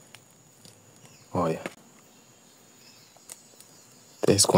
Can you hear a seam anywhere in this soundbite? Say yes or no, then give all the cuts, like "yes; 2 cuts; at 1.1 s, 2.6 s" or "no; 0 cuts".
yes; 1 cut; at 1.8 s